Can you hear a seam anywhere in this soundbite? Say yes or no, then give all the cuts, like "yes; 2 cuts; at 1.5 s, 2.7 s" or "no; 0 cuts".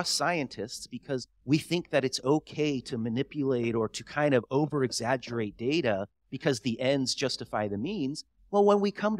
yes; 1 cut; at 1.3 s